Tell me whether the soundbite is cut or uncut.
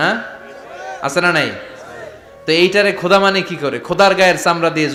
uncut